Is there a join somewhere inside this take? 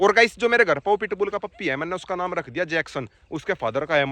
no; 0 cuts

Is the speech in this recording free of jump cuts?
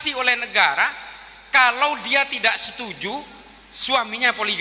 yes; 0 cuts

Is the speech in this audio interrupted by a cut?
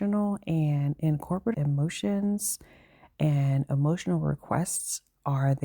yes; 1 cut; at 1.5 s

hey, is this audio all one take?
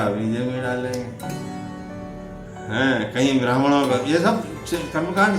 yes; 0 cuts

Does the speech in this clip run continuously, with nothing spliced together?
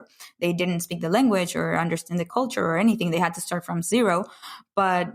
no; 1 cut; at 2.3 s

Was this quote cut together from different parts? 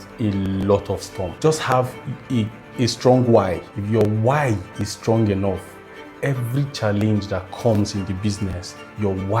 yes; 2 cuts; at 1.3 s, 2.7 s

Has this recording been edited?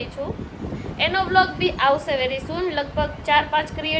no; 0 cuts

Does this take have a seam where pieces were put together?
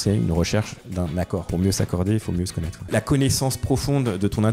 yes; 1 cut; at 2.8 s

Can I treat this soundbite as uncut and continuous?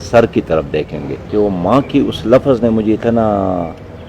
no; 1 cut; at 1.1 s

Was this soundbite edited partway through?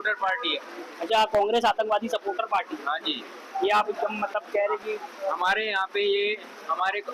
no; 0 cuts

